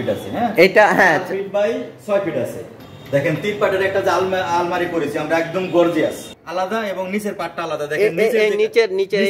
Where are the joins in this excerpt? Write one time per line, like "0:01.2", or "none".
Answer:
0:06.2